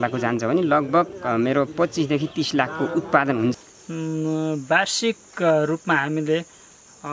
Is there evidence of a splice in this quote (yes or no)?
yes